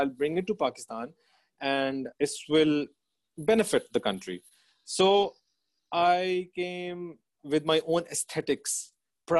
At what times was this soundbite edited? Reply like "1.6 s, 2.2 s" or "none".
2.1 s